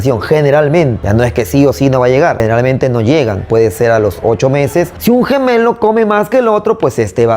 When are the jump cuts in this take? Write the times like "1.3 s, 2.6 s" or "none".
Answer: 1.0 s, 2.4 s, 4.9 s